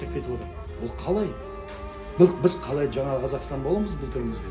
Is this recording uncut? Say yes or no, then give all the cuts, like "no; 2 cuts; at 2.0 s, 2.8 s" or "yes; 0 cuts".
yes; 0 cuts